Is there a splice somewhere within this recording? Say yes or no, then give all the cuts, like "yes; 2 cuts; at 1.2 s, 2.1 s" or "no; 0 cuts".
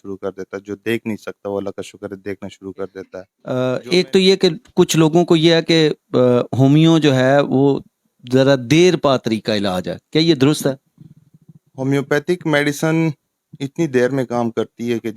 yes; 1 cut; at 3.0 s